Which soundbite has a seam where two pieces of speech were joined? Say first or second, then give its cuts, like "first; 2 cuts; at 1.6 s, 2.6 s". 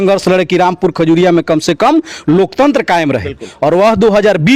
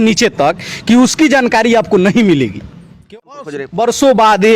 second; 1 cut; at 3.1 s